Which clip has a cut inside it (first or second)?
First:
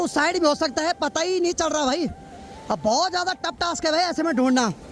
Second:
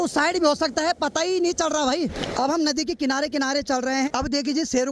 second